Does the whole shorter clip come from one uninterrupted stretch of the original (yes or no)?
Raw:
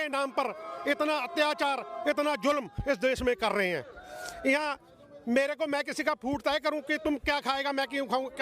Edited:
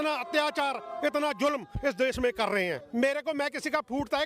no